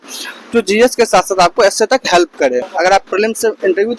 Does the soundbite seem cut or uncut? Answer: cut